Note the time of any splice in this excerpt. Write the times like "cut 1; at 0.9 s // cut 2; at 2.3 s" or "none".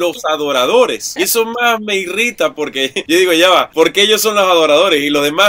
cut 1; at 1.0 s // cut 2; at 3.0 s